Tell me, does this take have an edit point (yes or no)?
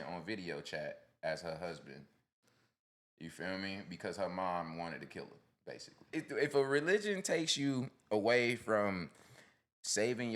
yes